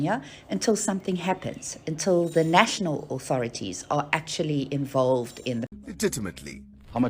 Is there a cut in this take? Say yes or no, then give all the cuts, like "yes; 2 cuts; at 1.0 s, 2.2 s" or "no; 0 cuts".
yes; 1 cut; at 5.7 s